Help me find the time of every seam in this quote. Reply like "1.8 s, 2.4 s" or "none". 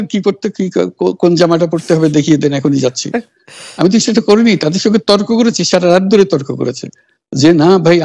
none